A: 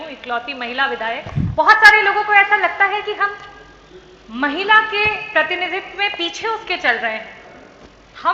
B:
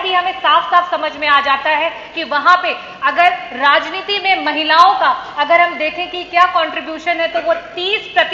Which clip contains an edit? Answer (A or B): A